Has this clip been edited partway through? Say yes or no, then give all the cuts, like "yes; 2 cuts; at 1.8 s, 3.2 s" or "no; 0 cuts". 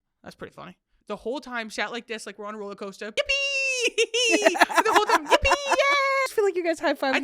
yes; 3 cuts; at 0.9 s, 3.1 s, 6.3 s